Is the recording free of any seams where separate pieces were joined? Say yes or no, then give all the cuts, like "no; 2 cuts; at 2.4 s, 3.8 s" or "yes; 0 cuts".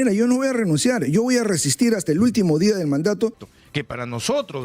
no; 1 cut; at 3.5 s